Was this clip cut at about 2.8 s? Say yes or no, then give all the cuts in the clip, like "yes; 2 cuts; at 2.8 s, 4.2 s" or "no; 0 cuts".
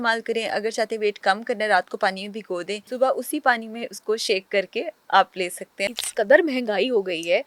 yes; 2 cuts; at 2.8 s, 5.9 s